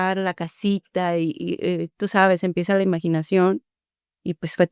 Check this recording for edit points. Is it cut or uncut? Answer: uncut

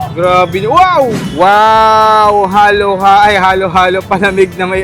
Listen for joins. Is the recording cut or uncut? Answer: cut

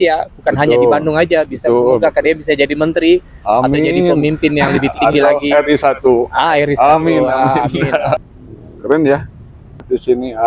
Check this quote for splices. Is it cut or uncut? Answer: cut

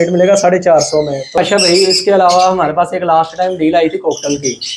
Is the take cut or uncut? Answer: cut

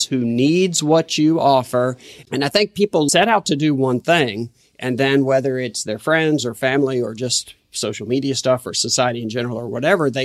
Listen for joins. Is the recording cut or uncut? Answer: cut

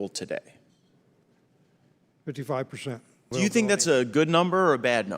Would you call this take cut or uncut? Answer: cut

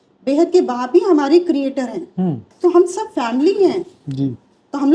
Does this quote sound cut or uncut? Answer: cut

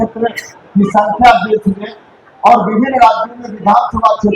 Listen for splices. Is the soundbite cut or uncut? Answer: uncut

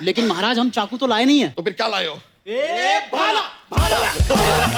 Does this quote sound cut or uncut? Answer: uncut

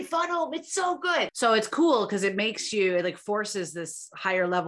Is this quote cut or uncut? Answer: cut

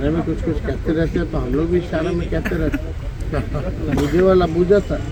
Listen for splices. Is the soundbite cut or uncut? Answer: uncut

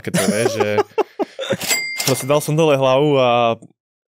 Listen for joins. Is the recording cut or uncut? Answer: cut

